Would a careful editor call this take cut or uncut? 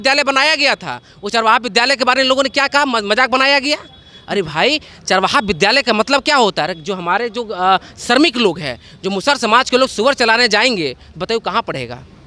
uncut